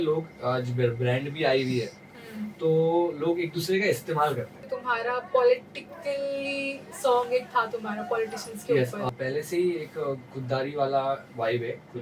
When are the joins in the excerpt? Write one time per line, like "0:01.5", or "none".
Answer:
0:04.7
0:09.1